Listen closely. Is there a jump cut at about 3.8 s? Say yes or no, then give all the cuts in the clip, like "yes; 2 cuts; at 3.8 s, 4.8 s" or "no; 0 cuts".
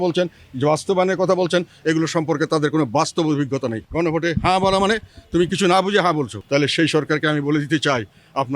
yes; 2 cuts; at 3.8 s, 6.4 s